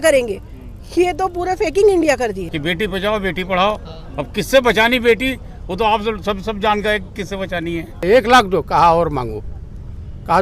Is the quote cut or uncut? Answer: cut